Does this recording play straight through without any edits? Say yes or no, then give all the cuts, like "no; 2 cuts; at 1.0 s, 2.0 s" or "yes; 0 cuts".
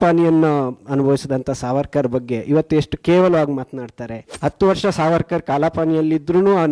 no; 1 cut; at 4.2 s